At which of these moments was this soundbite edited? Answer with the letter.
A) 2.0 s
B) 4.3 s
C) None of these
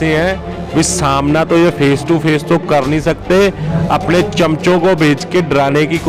C